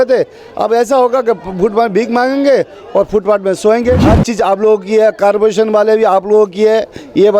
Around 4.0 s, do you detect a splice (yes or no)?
yes